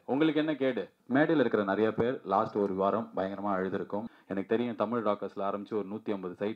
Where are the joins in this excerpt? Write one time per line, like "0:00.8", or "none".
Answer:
0:01.0
0:04.0